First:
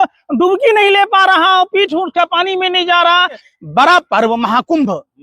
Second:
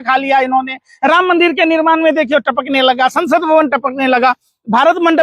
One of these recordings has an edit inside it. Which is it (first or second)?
first